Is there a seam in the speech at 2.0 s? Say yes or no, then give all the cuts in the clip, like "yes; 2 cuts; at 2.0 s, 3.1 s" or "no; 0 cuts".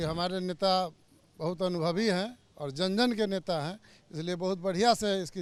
no; 0 cuts